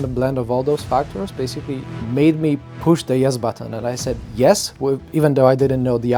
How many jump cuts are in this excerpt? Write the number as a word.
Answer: two